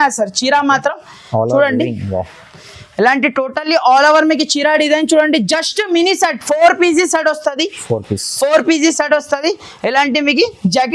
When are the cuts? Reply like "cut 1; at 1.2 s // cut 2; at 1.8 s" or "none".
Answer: none